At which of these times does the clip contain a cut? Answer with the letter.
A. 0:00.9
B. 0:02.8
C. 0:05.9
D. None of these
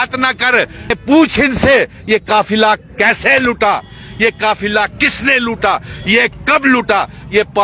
A